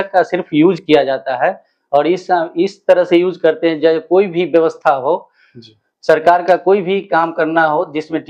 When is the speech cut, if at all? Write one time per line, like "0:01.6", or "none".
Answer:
none